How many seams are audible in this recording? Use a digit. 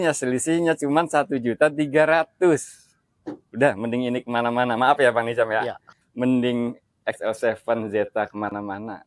1